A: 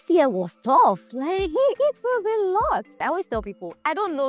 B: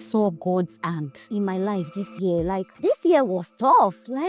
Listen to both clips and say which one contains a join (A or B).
A